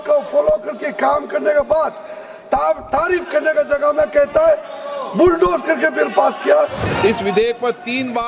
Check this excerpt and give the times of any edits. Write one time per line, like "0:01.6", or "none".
0:06.8